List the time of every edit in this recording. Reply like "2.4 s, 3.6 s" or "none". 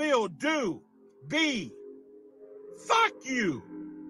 3.2 s